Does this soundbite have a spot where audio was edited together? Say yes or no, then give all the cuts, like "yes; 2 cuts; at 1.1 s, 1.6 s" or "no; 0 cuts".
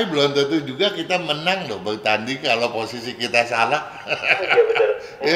no; 0 cuts